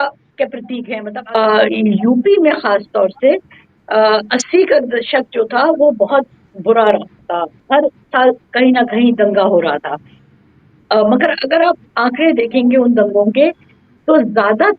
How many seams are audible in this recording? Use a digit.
1